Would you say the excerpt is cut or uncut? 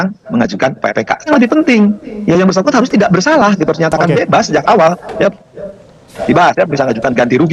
cut